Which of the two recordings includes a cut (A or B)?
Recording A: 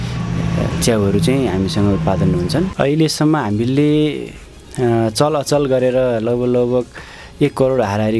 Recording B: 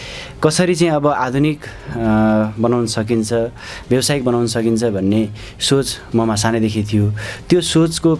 A